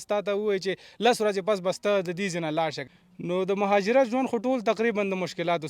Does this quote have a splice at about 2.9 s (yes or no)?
yes